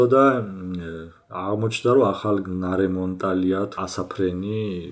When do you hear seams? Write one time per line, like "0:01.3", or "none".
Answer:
0:03.7